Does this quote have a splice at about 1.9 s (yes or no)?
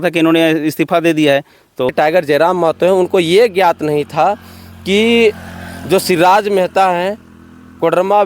yes